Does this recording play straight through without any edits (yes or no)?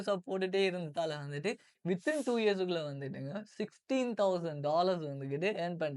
yes